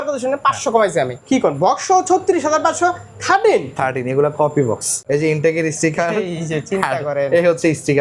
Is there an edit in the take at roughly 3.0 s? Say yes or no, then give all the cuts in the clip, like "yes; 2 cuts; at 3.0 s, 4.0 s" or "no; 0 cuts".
no; 2 cuts; at 1.2 s, 4.9 s